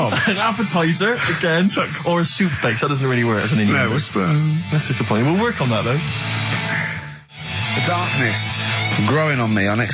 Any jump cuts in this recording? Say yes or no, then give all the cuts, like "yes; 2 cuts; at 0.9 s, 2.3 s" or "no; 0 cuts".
no; 0 cuts